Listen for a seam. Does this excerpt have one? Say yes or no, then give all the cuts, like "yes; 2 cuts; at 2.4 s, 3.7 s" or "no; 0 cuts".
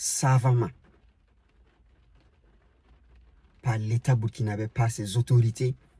no; 0 cuts